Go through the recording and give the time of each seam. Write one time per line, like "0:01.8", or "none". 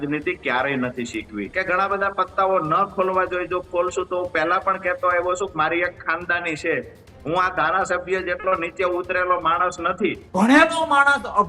0:01.4
0:10.2